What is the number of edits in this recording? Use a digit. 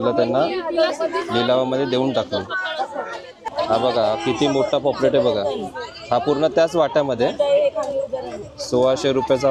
1